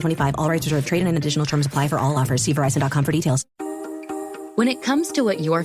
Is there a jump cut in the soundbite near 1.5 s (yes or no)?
no